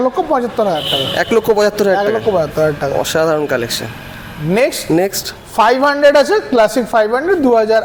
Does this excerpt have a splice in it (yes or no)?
no